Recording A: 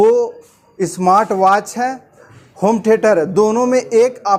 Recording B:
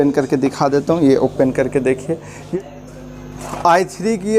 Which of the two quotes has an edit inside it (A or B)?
B